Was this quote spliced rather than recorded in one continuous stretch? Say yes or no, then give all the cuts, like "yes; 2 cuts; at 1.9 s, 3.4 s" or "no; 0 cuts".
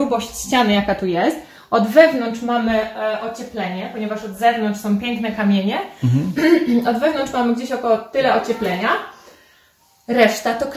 no; 0 cuts